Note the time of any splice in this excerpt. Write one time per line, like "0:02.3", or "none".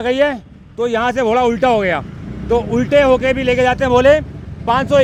none